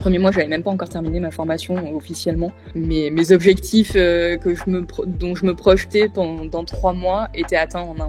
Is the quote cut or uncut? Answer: uncut